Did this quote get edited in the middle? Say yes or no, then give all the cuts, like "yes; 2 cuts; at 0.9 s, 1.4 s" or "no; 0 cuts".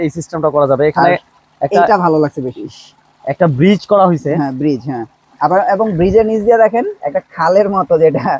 no; 0 cuts